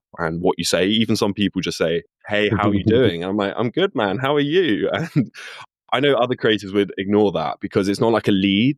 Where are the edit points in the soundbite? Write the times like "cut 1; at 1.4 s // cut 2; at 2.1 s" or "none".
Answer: cut 1; at 2.2 s